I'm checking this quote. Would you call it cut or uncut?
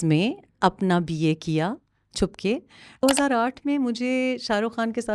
cut